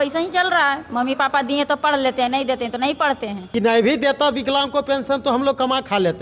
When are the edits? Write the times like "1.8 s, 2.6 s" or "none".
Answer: 3.4 s